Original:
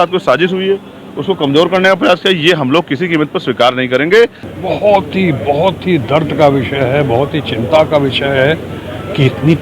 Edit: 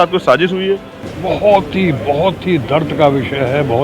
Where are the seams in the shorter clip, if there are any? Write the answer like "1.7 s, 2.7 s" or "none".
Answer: 1.1 s